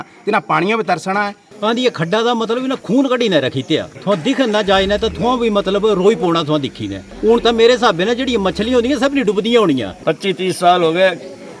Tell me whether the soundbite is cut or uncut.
cut